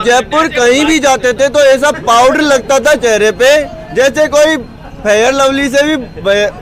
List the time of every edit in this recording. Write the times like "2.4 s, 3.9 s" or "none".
none